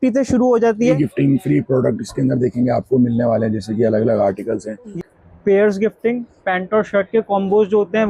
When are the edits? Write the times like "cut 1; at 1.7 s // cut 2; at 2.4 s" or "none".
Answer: cut 1; at 0.9 s // cut 2; at 4.9 s